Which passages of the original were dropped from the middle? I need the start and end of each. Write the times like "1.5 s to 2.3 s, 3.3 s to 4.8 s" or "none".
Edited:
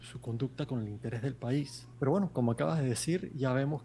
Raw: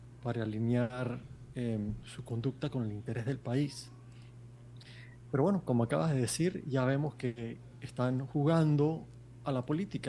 3.9 s to 5.1 s